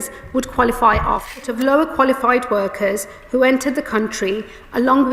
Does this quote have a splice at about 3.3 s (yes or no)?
no